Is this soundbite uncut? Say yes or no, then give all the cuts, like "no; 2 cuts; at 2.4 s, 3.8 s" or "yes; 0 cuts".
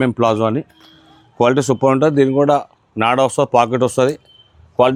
yes; 0 cuts